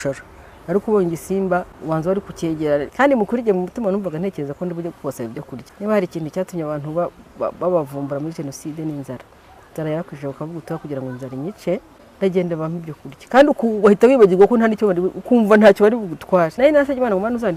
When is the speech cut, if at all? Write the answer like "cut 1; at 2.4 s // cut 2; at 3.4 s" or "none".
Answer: cut 1; at 1.7 s // cut 2; at 2.9 s // cut 3; at 5.6 s // cut 4; at 12.0 s // cut 5; at 16.5 s